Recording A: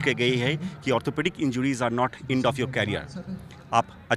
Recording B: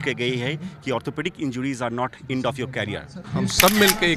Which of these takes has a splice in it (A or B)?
B